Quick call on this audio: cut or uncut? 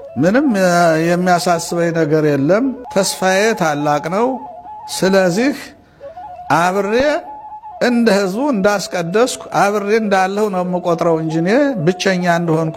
cut